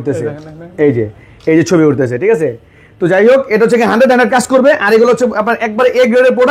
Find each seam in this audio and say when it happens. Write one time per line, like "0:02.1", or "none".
none